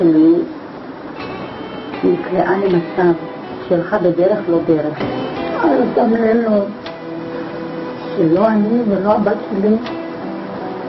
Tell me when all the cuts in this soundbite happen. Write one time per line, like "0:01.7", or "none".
none